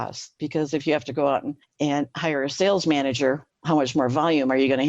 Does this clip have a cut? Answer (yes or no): yes